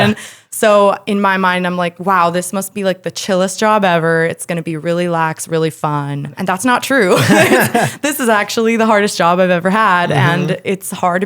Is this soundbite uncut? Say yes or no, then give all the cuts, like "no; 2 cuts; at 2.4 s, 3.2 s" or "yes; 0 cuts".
no; 1 cut; at 6.3 s